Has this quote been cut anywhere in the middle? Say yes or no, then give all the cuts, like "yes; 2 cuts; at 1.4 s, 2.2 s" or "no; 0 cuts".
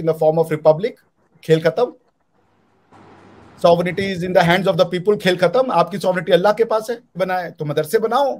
yes; 1 cut; at 7.1 s